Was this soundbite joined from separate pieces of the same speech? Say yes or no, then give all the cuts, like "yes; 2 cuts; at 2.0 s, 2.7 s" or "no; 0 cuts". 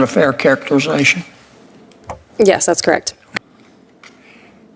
yes; 1 cut; at 3.2 s